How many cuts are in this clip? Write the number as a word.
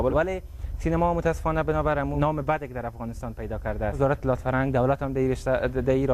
one